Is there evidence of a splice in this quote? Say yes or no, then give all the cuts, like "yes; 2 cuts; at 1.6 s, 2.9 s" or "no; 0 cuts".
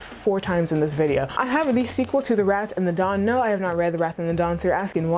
yes; 1 cut; at 1.3 s